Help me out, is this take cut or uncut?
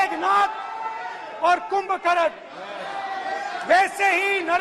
uncut